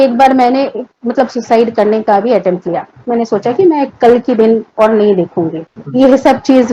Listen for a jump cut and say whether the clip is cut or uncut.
uncut